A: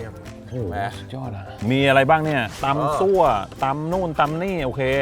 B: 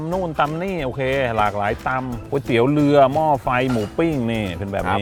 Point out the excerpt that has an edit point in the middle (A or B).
A